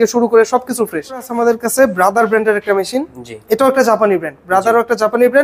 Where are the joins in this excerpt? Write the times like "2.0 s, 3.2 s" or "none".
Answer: 1.3 s